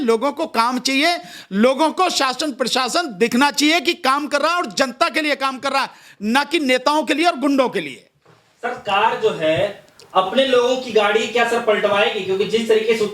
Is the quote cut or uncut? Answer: uncut